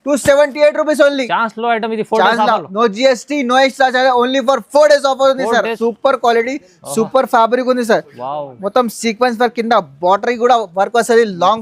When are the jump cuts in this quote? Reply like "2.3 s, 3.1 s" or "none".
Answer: 5.7 s